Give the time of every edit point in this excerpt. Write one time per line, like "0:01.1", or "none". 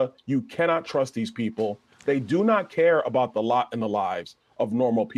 none